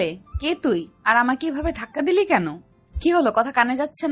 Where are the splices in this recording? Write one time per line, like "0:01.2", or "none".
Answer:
0:02.8